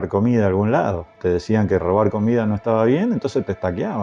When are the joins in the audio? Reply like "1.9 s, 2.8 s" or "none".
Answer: 1.1 s